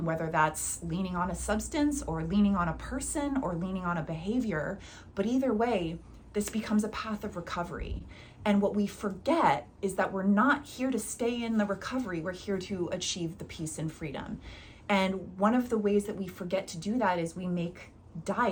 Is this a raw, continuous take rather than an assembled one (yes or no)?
yes